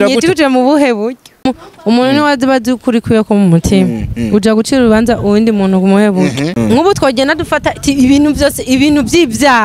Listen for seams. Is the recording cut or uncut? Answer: cut